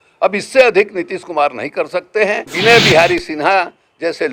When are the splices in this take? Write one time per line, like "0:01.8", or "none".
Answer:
0:02.5

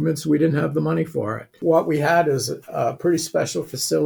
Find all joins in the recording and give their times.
0:01.6

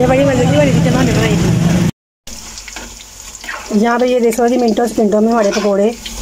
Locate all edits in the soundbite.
0:01.9

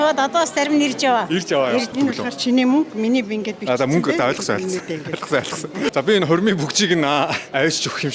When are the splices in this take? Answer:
0:01.9
0:05.9

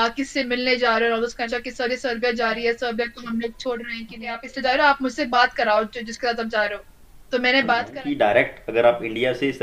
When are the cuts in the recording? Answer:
0:01.4
0:04.5
0:07.9

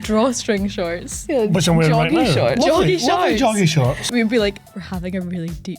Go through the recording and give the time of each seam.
0:04.1

